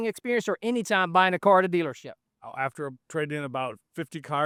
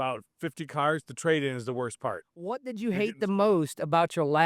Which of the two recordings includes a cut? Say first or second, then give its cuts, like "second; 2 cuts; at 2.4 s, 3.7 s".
second; 1 cut; at 2.6 s